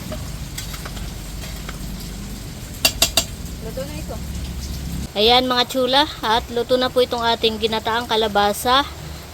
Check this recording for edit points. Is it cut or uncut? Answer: cut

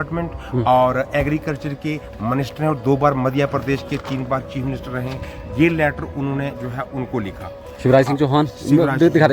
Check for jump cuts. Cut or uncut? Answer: uncut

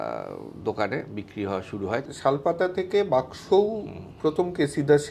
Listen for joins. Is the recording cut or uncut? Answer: cut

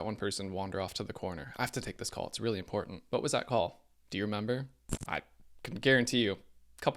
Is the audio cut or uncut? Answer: cut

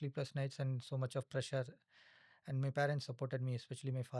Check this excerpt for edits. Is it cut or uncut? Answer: uncut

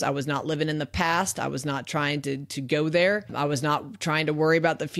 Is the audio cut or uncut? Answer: cut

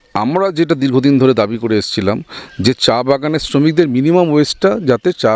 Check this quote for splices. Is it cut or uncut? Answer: uncut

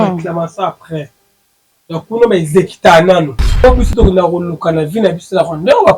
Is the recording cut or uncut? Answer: cut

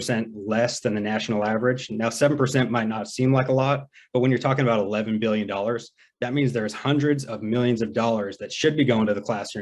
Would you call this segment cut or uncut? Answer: uncut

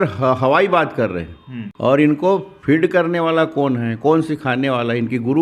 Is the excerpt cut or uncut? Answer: uncut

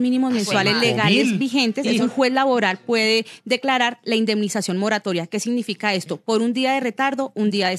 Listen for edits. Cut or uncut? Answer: cut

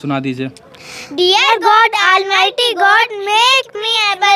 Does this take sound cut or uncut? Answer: uncut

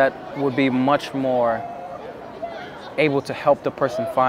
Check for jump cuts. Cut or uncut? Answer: uncut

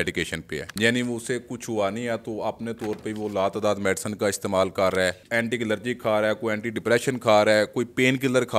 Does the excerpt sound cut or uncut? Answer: uncut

